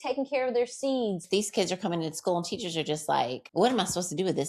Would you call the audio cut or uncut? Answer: cut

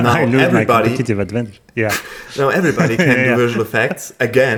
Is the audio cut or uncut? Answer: uncut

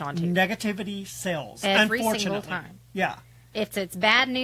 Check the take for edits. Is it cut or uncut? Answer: uncut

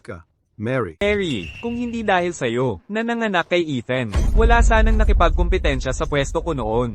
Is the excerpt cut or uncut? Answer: cut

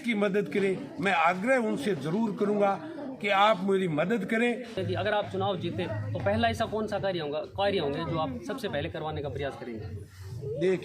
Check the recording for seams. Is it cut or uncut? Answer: cut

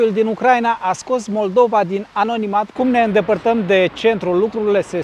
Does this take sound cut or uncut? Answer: cut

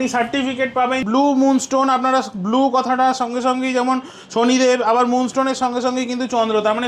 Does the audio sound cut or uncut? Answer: cut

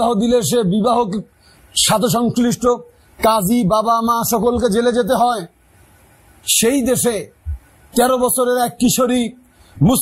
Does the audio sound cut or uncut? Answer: uncut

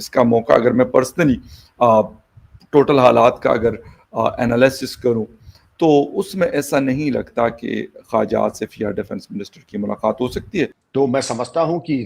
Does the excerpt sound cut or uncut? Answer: cut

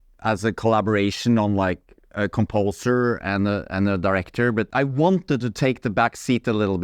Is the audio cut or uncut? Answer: cut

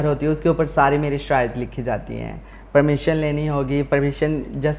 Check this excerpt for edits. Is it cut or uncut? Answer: uncut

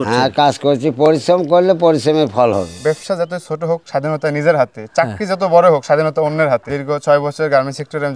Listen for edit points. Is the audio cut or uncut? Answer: cut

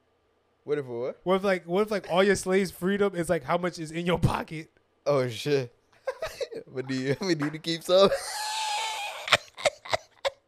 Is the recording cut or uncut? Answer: uncut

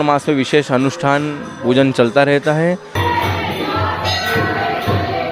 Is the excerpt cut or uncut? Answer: cut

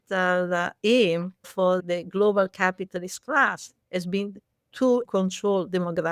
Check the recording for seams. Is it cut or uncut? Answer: cut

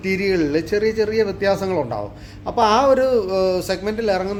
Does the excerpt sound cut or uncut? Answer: uncut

